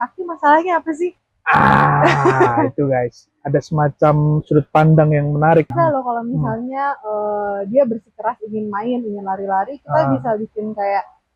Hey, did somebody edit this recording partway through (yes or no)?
yes